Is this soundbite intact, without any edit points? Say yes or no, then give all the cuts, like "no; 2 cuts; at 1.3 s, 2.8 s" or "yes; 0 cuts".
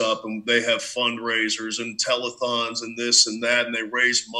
yes; 0 cuts